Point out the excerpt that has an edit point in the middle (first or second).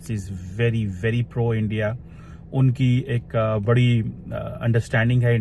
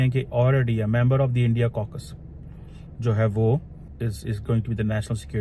second